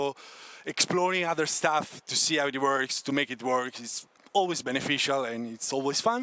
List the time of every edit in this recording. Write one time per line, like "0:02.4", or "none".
none